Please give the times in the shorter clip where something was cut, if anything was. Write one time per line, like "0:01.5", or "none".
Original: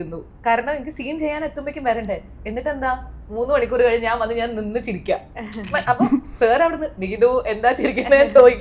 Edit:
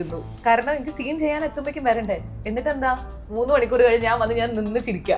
none